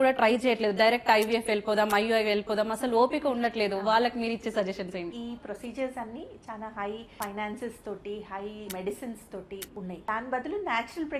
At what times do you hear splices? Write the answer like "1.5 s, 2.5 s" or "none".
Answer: 5.1 s, 7.1 s, 8.7 s, 9.9 s